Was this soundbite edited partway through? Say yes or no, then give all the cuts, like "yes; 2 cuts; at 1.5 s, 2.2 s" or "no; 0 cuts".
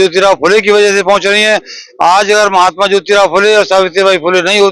no; 0 cuts